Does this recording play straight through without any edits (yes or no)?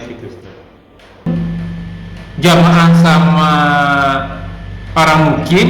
no